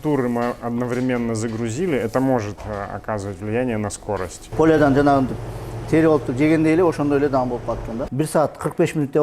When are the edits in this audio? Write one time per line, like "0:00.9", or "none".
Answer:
0:04.4
0:08.1